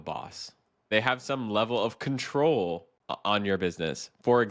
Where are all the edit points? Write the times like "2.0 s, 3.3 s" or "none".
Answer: 0.9 s, 2.9 s